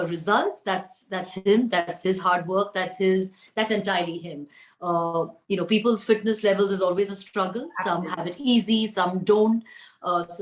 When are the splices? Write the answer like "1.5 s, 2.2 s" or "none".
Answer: none